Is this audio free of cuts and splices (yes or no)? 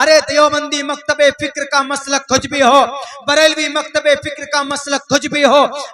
yes